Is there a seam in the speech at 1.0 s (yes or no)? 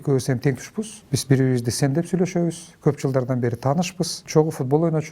yes